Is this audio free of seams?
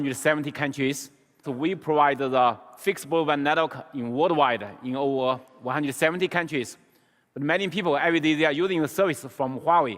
no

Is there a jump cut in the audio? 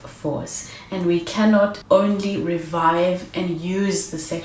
yes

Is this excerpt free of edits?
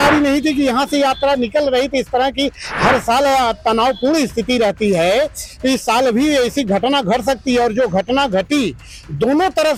yes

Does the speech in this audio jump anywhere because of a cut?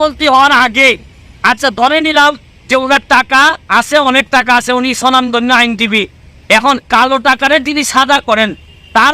no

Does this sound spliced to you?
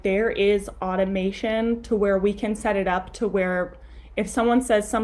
no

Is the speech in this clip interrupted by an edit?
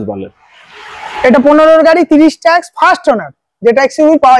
no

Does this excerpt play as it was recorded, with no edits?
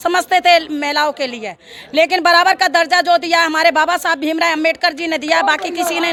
yes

